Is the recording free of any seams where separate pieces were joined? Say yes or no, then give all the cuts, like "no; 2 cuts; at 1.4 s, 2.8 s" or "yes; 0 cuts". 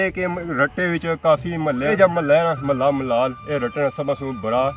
no; 1 cut; at 1.9 s